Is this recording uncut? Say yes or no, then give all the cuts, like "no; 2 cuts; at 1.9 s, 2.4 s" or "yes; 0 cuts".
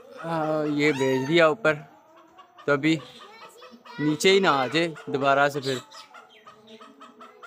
yes; 0 cuts